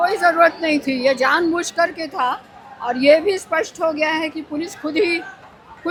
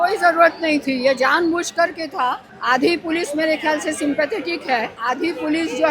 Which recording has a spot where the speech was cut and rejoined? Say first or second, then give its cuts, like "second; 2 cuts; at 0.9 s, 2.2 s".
second; 2 cuts; at 2.5 s, 5.0 s